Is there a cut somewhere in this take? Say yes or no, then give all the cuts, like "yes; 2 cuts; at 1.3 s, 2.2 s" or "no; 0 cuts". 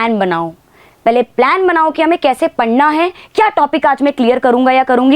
no; 0 cuts